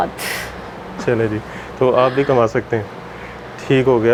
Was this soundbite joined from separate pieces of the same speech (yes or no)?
no